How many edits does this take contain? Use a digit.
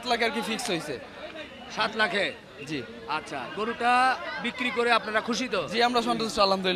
0